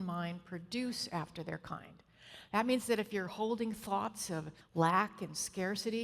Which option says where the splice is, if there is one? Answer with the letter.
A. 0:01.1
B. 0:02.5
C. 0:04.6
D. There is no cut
C